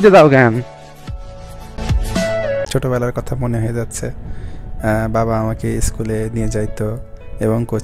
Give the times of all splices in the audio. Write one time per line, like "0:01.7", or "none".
0:02.7